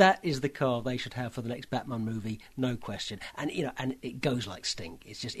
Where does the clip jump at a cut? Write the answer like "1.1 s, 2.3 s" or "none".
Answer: none